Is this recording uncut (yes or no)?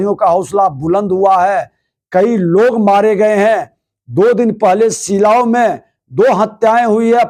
yes